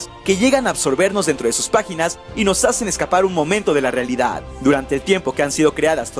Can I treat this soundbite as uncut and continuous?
yes; 0 cuts

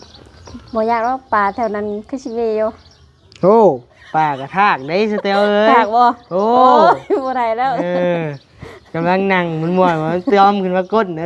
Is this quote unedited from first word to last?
yes; 0 cuts

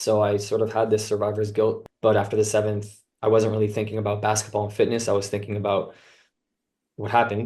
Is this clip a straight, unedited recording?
no; 1 cut; at 1.8 s

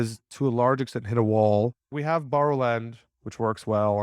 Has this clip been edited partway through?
yes; 1 cut; at 1.9 s

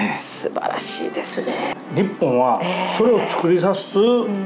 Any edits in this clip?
yes; 1 cut; at 1.7 s

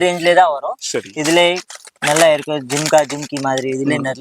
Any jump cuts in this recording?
no; 0 cuts

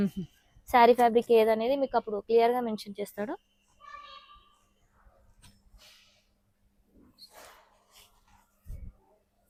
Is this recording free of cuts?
yes; 0 cuts

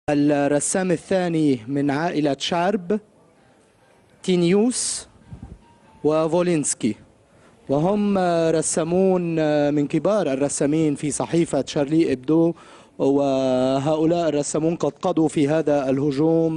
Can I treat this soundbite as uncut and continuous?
yes; 0 cuts

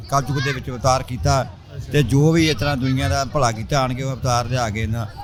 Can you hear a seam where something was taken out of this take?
no; 0 cuts

